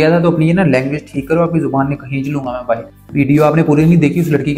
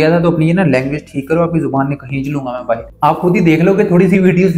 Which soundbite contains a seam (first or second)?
second